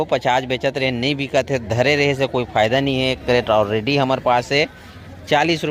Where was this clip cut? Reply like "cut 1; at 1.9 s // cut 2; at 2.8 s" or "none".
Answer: none